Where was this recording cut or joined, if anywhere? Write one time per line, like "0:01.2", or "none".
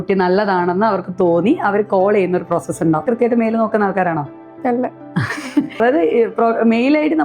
0:03.1
0:05.8